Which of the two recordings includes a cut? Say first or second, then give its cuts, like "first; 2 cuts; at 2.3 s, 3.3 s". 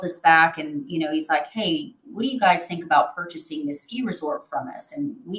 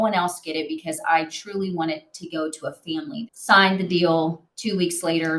second; 2 cuts; at 3.2 s, 4.5 s